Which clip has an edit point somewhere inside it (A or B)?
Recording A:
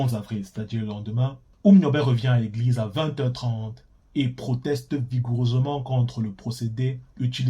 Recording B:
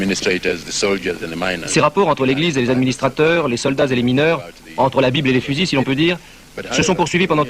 A